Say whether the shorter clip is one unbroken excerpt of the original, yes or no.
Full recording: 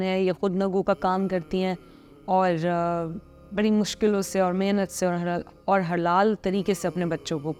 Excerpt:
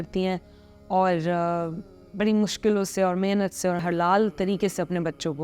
no